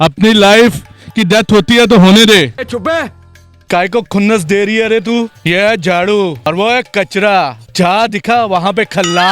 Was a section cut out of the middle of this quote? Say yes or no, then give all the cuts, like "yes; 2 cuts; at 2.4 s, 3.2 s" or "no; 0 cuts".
yes; 4 cuts; at 3.5 s, 5.4 s, 6.4 s, 7.6 s